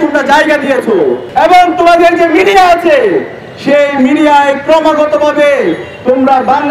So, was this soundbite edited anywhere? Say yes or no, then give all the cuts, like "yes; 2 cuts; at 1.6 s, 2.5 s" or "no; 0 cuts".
yes; 1 cut; at 1.2 s